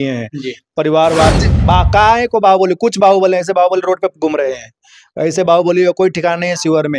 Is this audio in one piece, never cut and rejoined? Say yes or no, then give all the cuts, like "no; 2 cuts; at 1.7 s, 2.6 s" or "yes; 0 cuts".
no; 1 cut; at 1.4 s